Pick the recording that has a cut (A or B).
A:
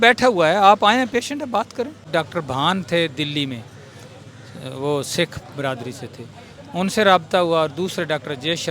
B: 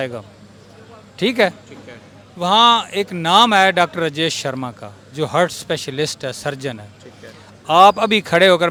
A